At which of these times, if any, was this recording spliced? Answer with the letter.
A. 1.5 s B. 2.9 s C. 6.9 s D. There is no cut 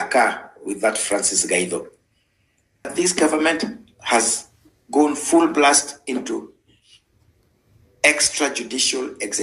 B